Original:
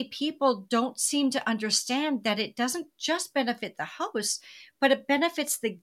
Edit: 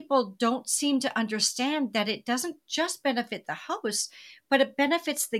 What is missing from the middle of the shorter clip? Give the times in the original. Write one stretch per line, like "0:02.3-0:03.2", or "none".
none

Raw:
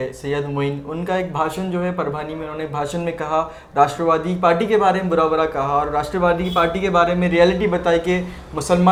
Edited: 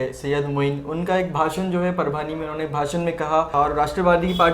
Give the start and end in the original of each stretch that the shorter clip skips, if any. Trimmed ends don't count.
0:03.5-0:05.7

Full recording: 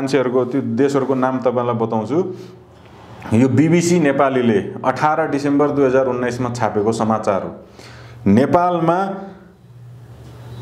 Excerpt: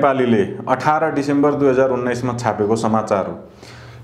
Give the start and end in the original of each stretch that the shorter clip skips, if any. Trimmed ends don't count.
none

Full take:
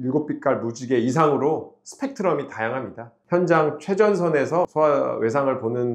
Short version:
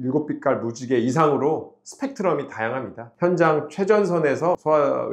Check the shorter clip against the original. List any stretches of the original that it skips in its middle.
0:03.0-0:03.1

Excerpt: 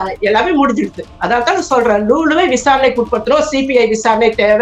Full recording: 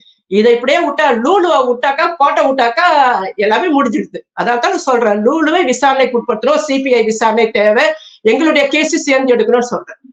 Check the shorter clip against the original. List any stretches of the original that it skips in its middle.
none

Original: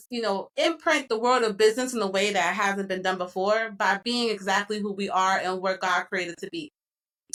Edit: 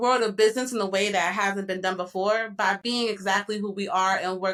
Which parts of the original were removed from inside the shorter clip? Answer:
none

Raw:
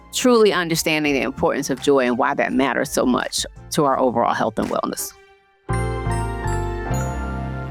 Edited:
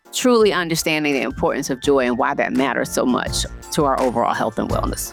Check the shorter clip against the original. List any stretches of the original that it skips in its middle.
none

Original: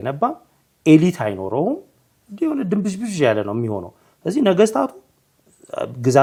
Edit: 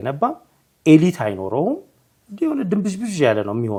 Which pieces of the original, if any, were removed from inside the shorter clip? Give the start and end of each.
none

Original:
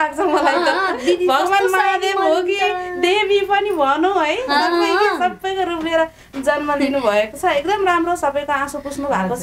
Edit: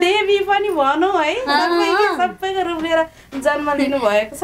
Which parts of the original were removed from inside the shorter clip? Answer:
none

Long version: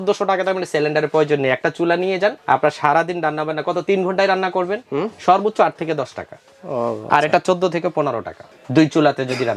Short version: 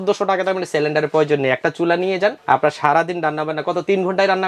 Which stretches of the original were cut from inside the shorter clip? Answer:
none

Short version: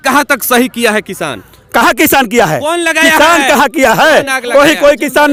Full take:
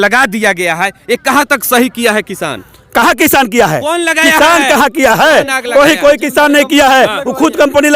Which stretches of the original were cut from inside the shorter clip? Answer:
none

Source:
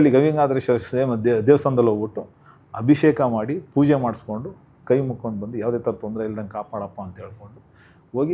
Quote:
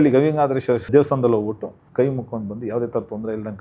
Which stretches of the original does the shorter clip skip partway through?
0:00.9-0:01.4
0:02.3-0:04.7

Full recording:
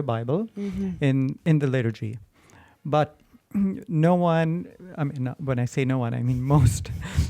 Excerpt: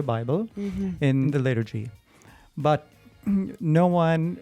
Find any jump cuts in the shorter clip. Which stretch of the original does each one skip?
0:01.3-0:01.6

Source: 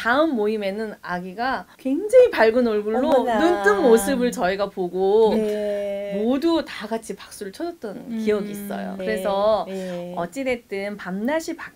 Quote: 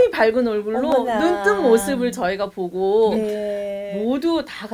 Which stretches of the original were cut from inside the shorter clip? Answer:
none

